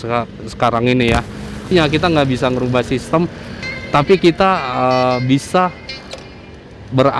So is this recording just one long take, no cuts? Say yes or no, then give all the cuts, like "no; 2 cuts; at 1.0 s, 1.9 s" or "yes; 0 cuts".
no; 1 cut; at 1.7 s